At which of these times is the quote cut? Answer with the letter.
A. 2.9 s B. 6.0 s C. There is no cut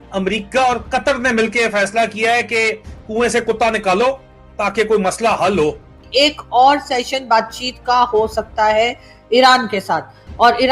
B